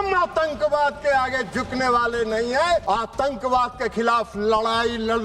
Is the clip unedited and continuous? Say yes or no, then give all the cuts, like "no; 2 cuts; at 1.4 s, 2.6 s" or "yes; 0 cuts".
no; 1 cut; at 2.8 s